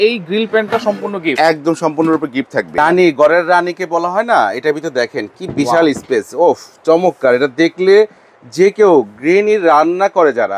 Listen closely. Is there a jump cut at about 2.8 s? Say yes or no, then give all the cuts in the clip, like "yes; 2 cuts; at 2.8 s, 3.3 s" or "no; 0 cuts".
yes; 1 cut; at 2.8 s